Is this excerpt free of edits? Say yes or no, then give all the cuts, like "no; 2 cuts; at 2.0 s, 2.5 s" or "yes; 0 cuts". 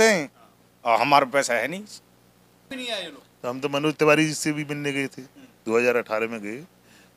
no; 1 cut; at 2.7 s